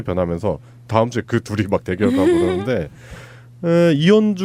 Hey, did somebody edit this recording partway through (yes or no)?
no